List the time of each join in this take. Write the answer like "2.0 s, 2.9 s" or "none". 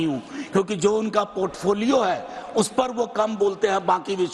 none